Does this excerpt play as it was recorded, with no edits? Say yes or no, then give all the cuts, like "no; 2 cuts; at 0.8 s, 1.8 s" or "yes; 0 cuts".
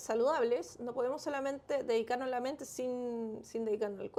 yes; 0 cuts